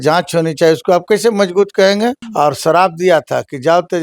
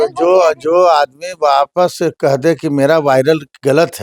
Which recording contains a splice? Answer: first; 1 cut; at 2.2 s

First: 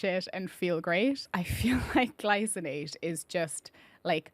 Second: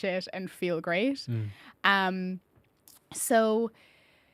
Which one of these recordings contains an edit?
first; 1 cut; at 1.3 s

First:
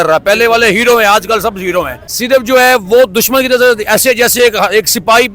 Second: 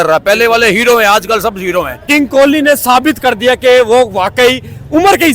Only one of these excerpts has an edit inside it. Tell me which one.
second; 1 cut; at 2.0 s

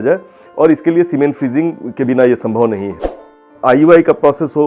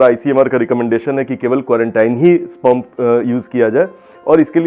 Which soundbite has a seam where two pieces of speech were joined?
first; 1 cut; at 3.5 s

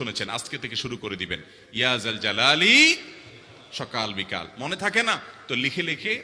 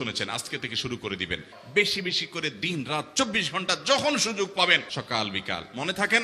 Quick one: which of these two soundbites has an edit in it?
second; 2 cuts; at 1.5 s, 4.9 s

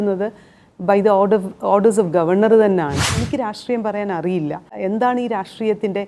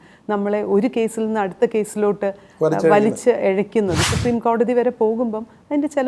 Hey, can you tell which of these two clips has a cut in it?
first; 2 cuts; at 3.2 s, 4.7 s

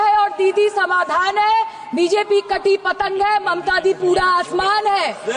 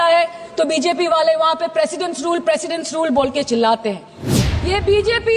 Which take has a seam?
second; 1 cut; at 4.3 s

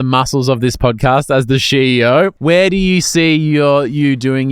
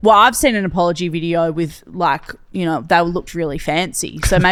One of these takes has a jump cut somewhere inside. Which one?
first; 1 cut; at 2.4 s

